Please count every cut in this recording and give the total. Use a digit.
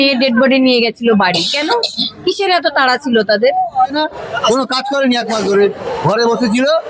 1